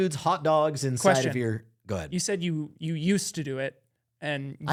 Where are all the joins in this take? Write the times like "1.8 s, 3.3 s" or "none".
none